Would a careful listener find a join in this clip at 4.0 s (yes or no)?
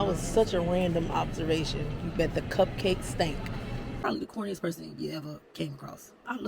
yes